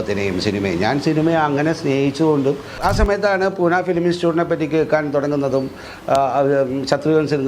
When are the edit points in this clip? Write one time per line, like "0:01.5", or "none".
0:02.7